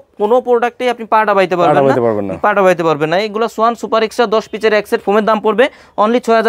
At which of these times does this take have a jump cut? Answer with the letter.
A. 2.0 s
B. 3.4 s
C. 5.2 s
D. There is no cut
D